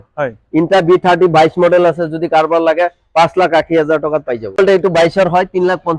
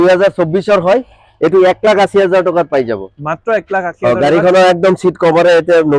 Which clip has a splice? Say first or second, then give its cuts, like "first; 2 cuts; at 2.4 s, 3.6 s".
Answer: first; 1 cut; at 4.6 s